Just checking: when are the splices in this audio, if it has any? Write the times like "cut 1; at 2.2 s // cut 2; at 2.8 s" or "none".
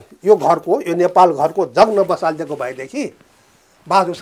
none